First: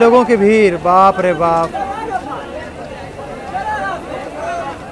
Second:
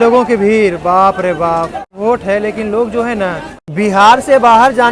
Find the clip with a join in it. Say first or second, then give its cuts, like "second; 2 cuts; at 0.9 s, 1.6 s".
second; 2 cuts; at 2.0 s, 3.5 s